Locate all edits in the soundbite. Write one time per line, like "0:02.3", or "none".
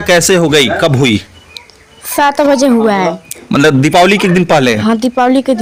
none

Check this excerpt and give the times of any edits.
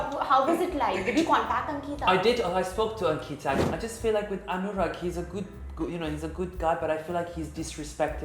0:03.7

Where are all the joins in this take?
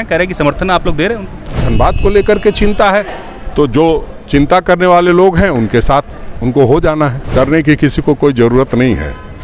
0:01.6
0:07.2

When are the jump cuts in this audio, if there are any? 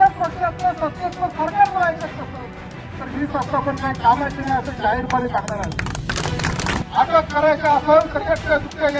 0:06.8

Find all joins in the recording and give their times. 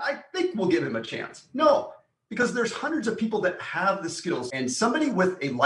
0:04.5

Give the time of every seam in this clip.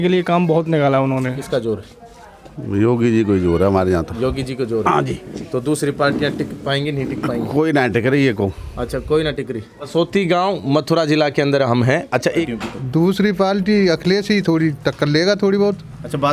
0:01.4
0:09.9
0:12.5

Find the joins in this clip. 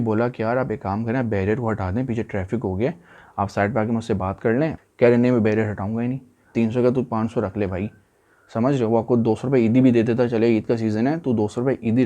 0:03.2
0:04.8
0:06.5

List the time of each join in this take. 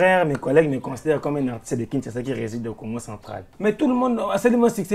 0:03.4

